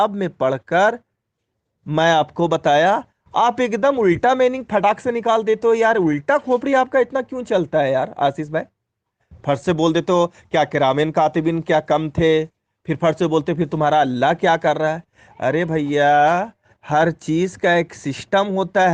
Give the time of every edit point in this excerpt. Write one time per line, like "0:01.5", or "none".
none

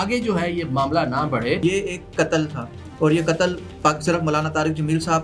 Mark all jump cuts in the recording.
0:01.6

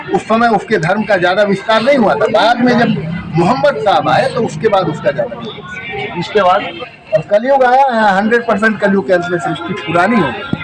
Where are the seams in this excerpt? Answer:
0:06.7

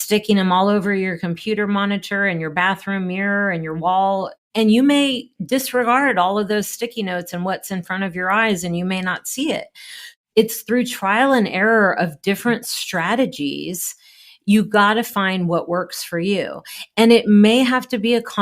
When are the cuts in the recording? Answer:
0:04.4
0:10.1

